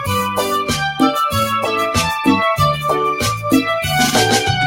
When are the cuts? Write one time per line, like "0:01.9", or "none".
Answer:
none